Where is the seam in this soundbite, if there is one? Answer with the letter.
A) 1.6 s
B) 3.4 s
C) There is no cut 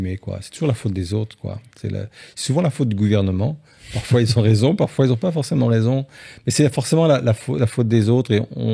C